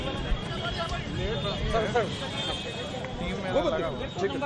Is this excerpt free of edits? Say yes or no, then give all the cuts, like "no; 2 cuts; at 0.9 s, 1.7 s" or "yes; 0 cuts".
no; 1 cut; at 1.7 s